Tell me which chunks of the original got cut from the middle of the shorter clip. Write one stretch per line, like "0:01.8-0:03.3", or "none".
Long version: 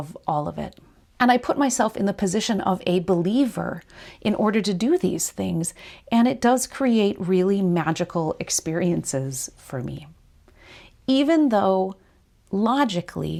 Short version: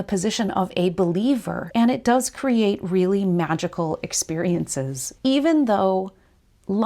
0:03.7-0:05.9
0:09.4-0:10.9